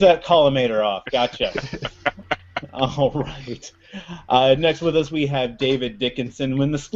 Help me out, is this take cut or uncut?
cut